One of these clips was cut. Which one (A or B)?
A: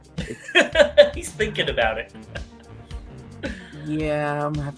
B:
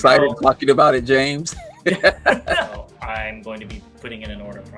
B